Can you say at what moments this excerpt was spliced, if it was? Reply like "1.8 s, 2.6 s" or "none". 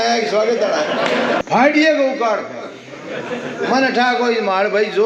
1.4 s